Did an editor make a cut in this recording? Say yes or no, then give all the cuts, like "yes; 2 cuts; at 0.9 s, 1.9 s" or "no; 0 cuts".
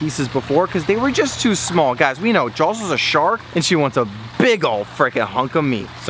no; 0 cuts